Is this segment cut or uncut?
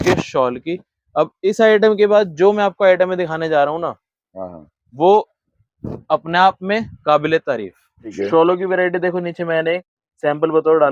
cut